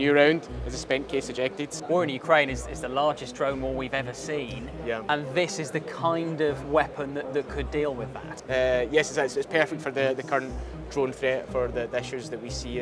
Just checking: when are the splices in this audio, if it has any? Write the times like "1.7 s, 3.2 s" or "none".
1.7 s